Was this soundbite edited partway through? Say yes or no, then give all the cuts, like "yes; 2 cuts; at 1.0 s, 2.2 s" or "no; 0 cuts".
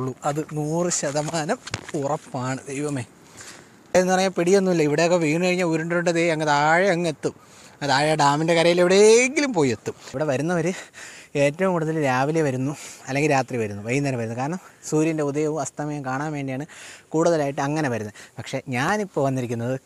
yes; 2 cuts; at 3.9 s, 10.1 s